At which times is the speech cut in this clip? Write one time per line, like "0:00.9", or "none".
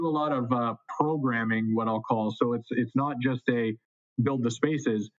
none